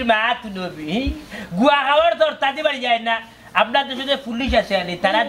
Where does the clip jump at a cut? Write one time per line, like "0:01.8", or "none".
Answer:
none